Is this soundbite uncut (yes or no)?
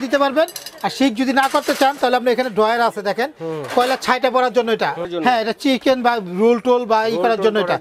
no